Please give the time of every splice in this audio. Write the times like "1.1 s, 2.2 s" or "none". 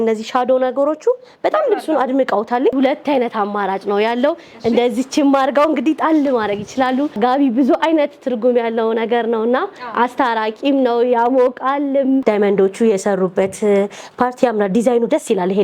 2.7 s, 7.2 s, 12.2 s